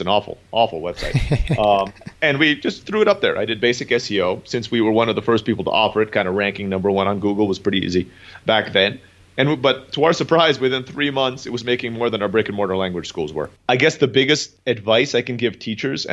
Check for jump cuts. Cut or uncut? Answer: cut